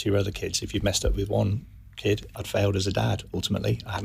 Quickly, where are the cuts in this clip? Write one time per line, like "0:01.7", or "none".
0:02.4